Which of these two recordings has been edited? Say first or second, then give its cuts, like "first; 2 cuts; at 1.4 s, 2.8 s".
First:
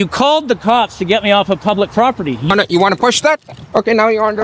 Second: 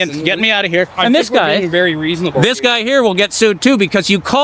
first; 1 cut; at 2.5 s